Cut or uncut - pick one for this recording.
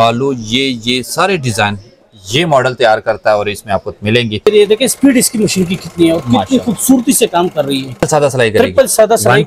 cut